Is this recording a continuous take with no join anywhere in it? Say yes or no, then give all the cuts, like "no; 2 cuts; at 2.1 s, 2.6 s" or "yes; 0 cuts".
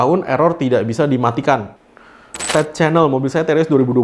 no; 1 cut; at 2.1 s